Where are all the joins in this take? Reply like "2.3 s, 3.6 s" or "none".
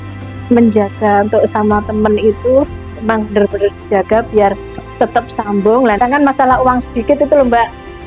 6.0 s